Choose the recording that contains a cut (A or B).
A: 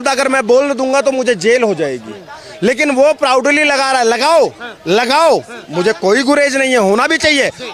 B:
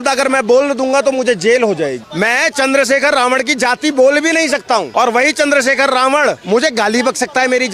B